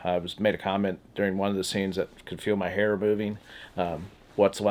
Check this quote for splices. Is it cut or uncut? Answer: uncut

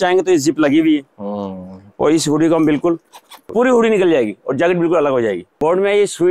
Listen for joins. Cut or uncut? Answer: cut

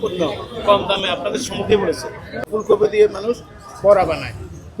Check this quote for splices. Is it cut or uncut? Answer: cut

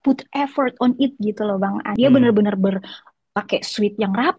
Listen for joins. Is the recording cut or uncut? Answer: cut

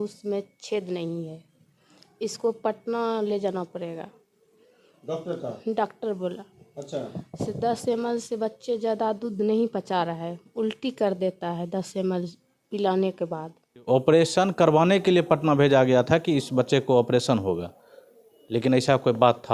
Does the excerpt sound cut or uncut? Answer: cut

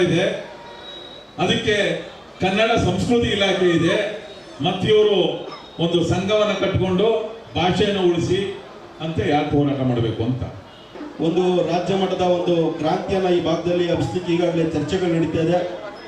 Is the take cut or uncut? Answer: cut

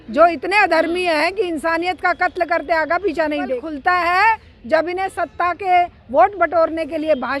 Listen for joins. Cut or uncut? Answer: cut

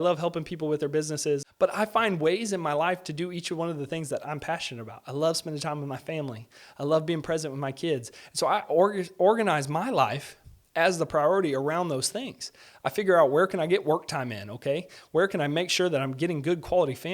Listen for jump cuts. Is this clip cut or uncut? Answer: cut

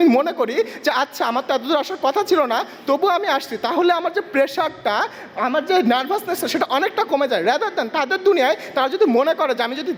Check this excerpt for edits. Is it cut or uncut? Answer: uncut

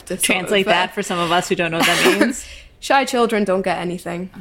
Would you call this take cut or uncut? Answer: uncut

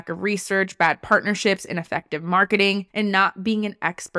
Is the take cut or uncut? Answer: uncut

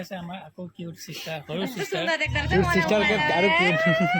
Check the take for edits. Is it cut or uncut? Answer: uncut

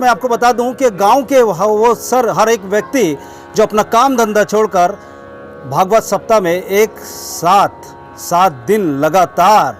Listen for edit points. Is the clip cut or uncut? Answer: cut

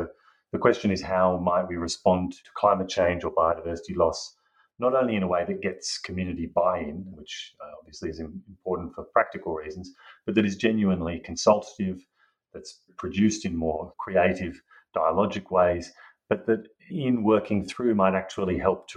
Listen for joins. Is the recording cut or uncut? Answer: cut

